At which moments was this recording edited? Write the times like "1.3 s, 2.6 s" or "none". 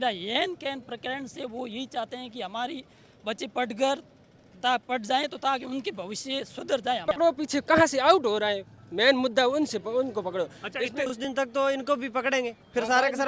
7.0 s, 11.2 s